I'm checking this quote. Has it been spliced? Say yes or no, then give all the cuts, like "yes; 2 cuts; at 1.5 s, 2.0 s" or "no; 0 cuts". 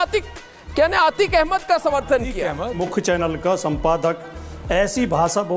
yes; 1 cut; at 2.8 s